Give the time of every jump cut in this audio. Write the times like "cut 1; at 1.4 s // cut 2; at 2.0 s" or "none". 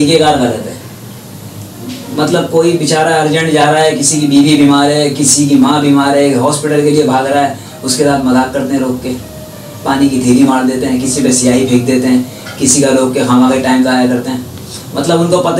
none

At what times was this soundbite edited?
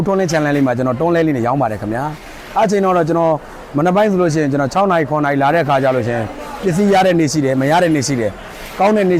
none

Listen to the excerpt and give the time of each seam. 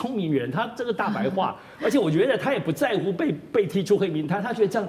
none

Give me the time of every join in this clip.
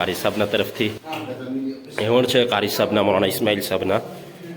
cut 1; at 1.0 s

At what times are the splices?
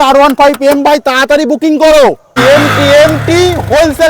cut 1; at 2.4 s

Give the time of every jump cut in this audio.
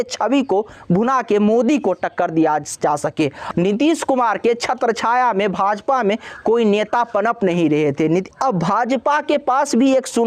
cut 1; at 3.4 s // cut 2; at 8.3 s

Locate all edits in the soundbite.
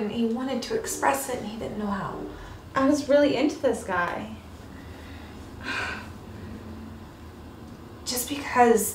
cut 1; at 0.9 s

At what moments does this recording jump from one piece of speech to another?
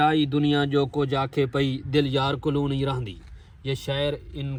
none

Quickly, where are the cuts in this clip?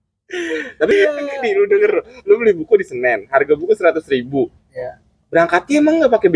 cut 1; at 0.9 s

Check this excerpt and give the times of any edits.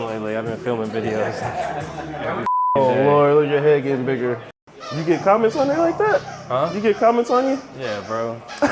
cut 1; at 4.5 s

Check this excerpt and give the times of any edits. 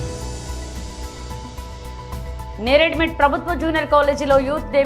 cut 1; at 0.9 s

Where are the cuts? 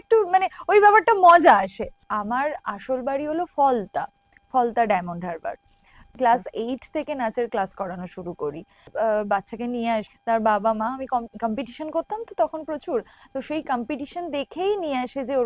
cut 1; at 2.1 s // cut 2; at 6.1 s // cut 3; at 8.9 s // cut 4; at 10.1 s

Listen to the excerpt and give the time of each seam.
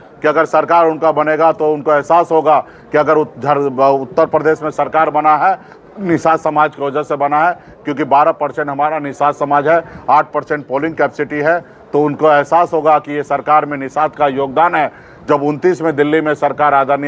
none

